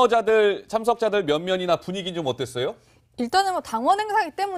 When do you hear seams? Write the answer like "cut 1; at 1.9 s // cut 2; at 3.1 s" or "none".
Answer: cut 1; at 1.0 s